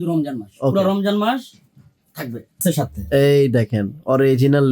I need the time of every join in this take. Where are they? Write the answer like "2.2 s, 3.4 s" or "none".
2.6 s